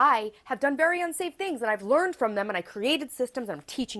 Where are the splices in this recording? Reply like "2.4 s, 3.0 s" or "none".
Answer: none